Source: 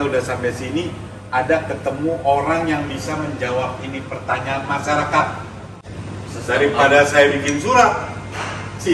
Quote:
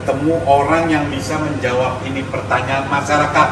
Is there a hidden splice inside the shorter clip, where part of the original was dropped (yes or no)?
no